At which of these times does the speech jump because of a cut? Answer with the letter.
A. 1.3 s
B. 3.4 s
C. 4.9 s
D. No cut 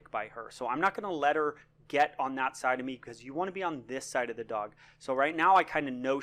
A